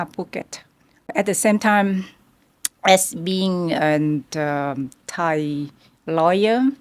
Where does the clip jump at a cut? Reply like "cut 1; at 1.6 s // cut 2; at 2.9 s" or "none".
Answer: cut 1; at 1.1 s